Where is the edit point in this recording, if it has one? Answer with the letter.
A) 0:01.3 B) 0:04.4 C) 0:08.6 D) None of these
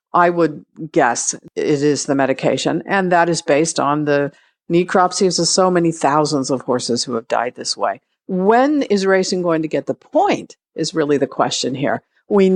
A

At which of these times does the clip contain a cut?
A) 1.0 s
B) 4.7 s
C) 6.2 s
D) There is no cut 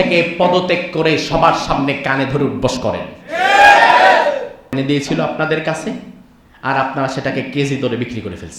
B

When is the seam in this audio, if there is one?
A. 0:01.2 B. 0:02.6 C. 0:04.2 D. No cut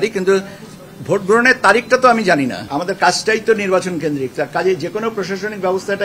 B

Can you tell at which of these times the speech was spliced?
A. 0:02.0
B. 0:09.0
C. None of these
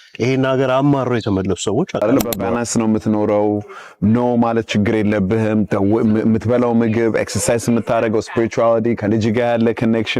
A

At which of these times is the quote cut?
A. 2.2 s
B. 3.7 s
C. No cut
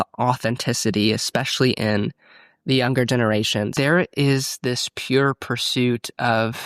B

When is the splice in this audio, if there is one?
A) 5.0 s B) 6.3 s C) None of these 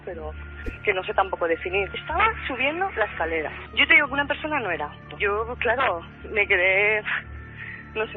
C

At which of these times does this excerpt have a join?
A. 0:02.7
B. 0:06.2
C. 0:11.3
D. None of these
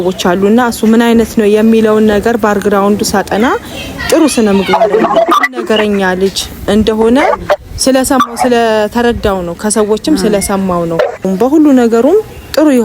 C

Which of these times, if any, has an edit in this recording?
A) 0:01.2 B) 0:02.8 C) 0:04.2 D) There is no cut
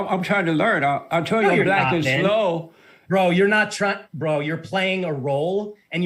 D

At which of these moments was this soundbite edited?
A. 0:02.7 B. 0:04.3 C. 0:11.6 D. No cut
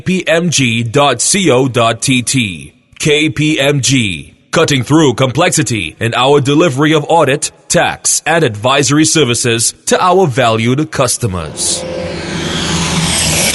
C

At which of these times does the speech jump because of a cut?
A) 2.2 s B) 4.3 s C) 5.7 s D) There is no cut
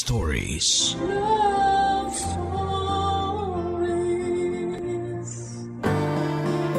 C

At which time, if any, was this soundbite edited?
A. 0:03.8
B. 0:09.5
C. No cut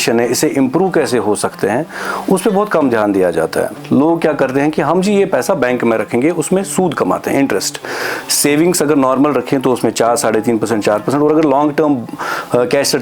A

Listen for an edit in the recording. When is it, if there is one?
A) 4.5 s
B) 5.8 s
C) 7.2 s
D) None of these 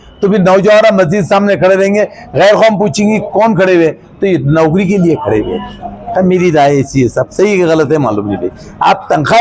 D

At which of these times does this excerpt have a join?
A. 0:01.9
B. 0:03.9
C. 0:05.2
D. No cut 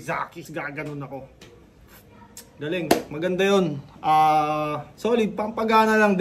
D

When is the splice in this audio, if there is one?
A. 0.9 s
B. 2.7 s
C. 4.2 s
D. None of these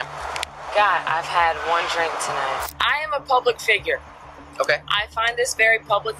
B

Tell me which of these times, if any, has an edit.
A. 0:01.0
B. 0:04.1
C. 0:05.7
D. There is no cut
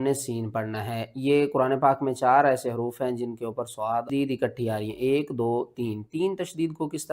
B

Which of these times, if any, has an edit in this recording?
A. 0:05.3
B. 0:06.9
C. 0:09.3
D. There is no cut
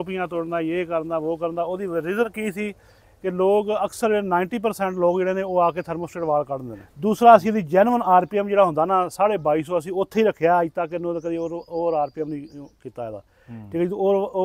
B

